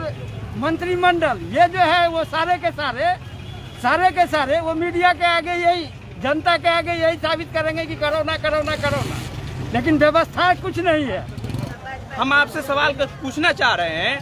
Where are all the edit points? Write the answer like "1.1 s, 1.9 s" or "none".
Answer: 11.6 s

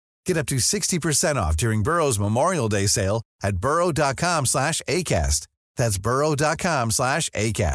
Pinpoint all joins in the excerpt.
none

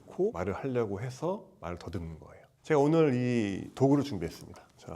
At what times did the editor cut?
2.6 s

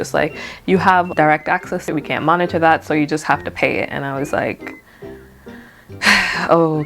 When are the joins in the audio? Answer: 1.9 s

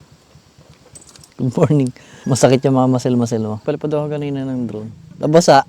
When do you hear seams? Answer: 1.2 s, 2.2 s, 3.6 s

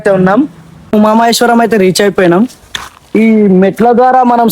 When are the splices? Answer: 0.9 s

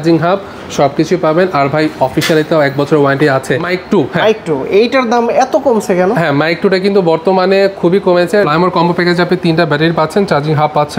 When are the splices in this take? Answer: 3.6 s, 8.5 s

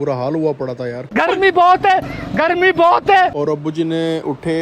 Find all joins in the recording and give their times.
none

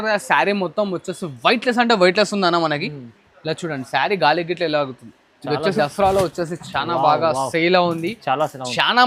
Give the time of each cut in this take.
5.8 s

